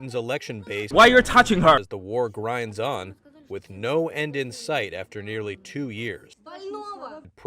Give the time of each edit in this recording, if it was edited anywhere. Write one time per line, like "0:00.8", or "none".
0:06.4